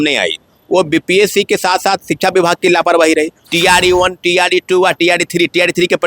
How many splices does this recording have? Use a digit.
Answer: 1